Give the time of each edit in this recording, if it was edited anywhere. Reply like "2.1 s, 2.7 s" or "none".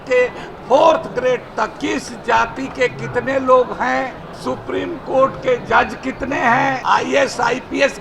1.7 s, 4.3 s, 6.8 s

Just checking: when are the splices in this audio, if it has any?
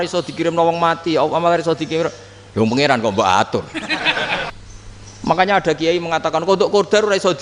4.5 s

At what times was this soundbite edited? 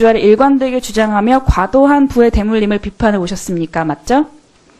0.9 s

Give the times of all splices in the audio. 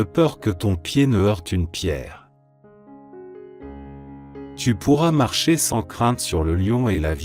2.3 s, 4.3 s

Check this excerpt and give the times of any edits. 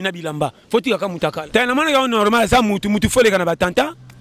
1.4 s

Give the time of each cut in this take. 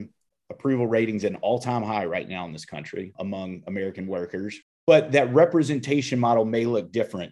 4.7 s

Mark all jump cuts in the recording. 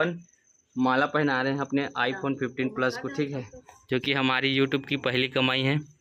none

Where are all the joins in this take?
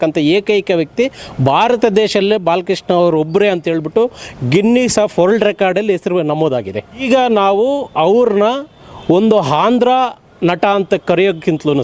7.0 s

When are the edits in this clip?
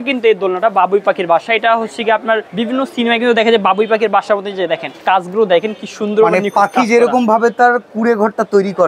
2.5 s, 4.9 s, 7.9 s

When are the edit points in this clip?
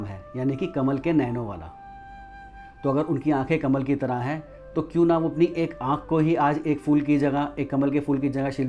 none

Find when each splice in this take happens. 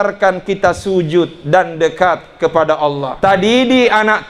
3.1 s

